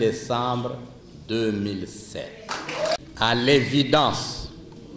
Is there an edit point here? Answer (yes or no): yes